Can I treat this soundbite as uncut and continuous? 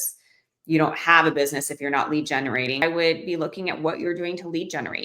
no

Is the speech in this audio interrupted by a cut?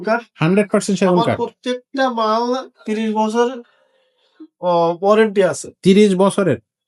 no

